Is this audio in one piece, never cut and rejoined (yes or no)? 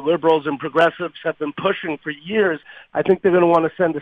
no